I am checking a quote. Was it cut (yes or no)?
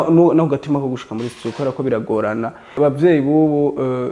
yes